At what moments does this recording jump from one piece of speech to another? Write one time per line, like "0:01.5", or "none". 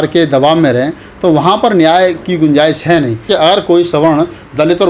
0:03.3